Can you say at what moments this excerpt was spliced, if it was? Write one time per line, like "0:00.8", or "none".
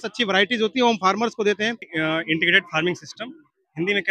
0:01.9

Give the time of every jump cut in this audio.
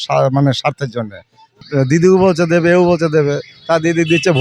0:01.6

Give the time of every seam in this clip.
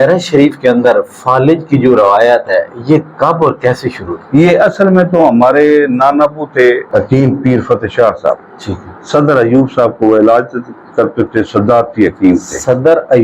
0:06.8

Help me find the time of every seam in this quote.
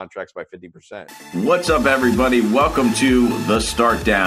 0:01.2

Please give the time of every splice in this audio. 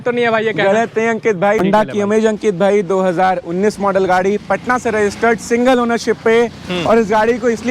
0:01.6

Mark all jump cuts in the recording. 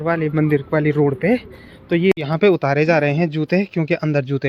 0:02.1

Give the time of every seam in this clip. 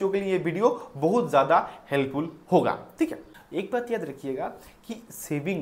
0:03.2

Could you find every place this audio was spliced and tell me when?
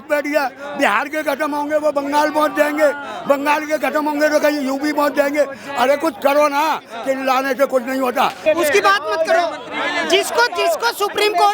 0:08.4

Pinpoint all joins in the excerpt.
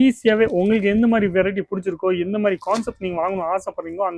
none

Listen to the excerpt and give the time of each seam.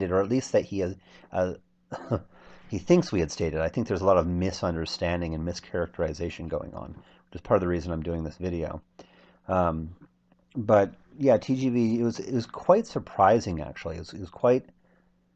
0:13.3

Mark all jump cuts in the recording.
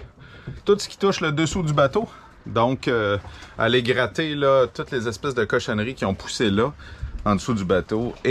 none

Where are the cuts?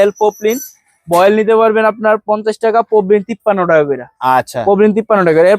none

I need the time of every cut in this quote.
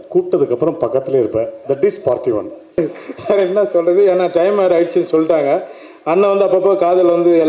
0:02.8

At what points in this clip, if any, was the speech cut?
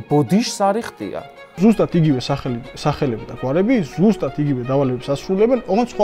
0:01.6

